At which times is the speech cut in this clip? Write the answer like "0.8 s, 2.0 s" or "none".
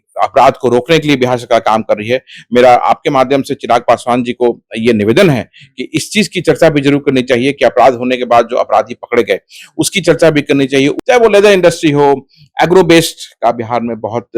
11.0 s